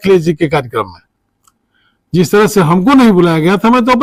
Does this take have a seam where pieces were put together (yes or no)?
no